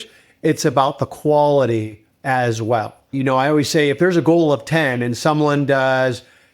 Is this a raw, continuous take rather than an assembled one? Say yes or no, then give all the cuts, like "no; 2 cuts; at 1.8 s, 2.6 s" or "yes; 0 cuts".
no; 1 cut; at 3.1 s